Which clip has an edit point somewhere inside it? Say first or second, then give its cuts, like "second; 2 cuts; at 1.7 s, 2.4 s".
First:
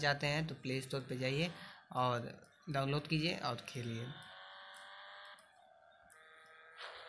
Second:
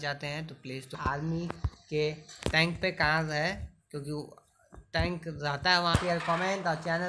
second; 2 cuts; at 1.0 s, 5.9 s